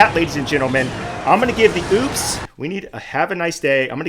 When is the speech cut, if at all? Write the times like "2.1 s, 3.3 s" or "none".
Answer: 2.6 s

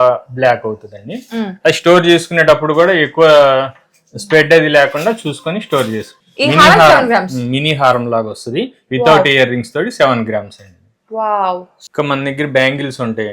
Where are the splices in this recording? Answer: 6.2 s, 11.7 s

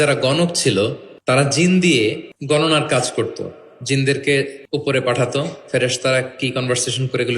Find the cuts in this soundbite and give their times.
1.1 s, 2.3 s, 4.6 s

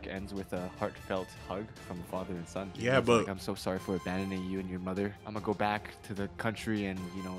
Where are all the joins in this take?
2.7 s, 5.3 s

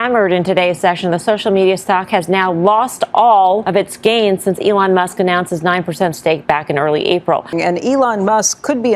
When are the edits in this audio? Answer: 3.6 s, 7.5 s

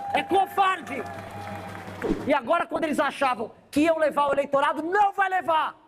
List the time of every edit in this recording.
2.1 s

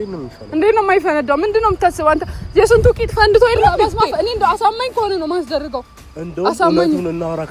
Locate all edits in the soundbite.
3.8 s

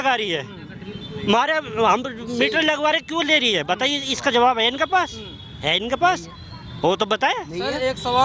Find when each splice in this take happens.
none

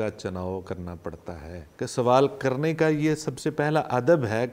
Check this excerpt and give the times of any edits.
1.6 s

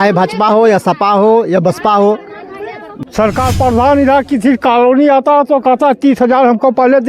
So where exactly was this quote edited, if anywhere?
2.9 s

